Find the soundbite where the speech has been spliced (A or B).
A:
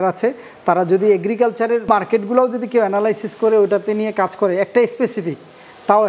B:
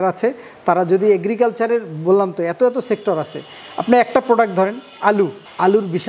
A